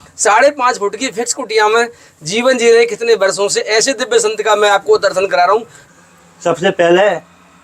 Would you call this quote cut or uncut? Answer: cut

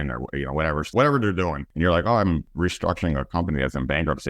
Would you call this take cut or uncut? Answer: cut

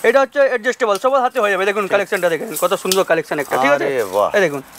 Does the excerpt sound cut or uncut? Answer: uncut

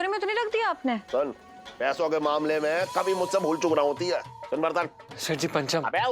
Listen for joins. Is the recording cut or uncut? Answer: cut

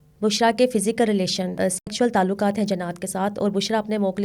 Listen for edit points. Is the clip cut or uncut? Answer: cut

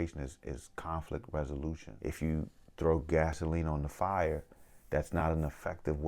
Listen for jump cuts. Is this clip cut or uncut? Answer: cut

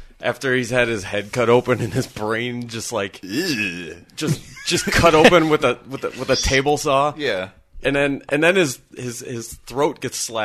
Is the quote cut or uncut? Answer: uncut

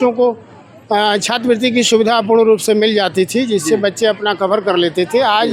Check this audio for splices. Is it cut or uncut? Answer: uncut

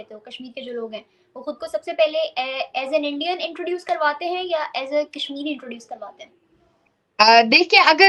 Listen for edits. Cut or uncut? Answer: uncut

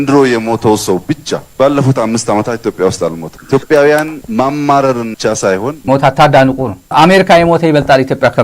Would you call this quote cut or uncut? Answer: cut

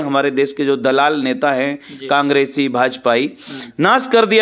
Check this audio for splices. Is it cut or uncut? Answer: uncut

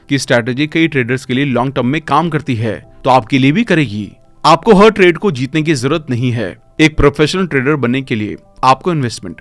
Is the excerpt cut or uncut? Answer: uncut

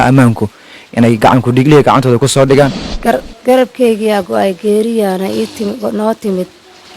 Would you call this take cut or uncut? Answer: cut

